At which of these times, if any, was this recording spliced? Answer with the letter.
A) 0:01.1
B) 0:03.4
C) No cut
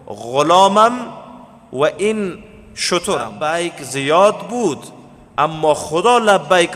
B